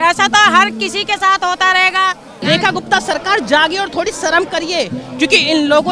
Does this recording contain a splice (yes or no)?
yes